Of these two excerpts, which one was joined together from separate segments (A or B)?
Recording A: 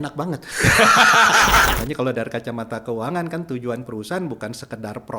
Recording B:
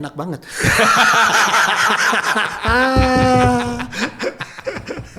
A